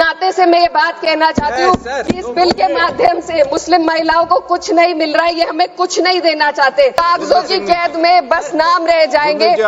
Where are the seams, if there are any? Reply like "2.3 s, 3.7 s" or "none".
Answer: 6.9 s